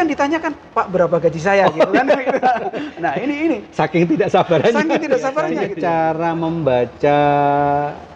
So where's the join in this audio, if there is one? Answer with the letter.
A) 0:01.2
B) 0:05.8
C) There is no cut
B